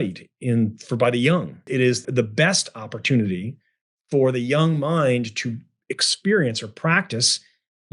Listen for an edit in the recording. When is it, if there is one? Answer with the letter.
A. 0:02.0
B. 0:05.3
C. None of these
A